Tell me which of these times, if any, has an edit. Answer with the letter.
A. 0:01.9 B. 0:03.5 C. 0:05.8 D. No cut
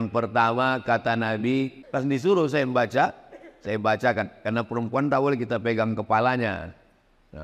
A